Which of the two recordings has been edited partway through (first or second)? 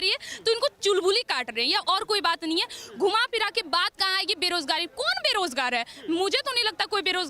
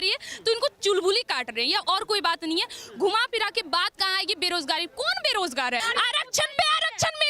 second